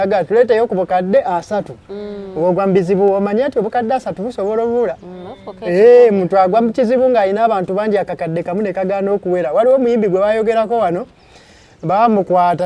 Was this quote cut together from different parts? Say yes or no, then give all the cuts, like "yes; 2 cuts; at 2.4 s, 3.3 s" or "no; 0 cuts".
no; 0 cuts